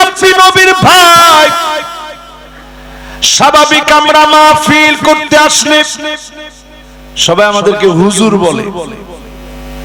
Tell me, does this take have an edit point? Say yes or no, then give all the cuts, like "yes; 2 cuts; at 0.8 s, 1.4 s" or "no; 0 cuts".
no; 0 cuts